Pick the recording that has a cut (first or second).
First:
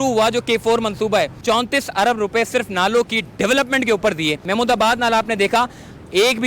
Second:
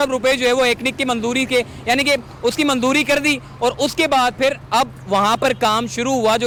first